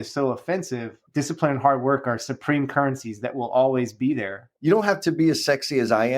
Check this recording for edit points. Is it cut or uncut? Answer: cut